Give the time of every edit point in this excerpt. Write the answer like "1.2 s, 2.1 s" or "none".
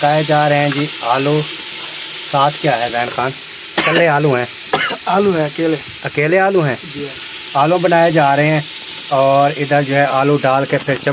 none